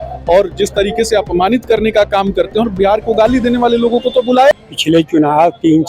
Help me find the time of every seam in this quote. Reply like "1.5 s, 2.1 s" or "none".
4.5 s